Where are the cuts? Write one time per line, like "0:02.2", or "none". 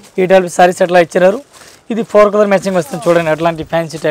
none